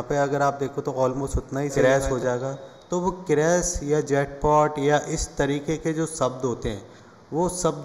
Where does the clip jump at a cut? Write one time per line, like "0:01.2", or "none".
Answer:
0:01.7